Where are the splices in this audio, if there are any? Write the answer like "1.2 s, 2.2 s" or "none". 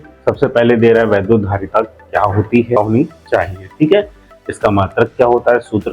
2.8 s